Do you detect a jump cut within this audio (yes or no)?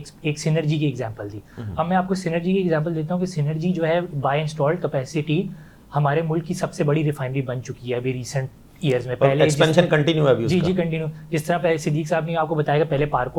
no